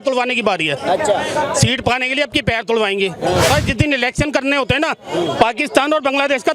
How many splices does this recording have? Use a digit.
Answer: 1